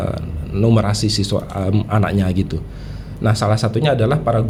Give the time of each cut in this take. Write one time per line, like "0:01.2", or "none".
none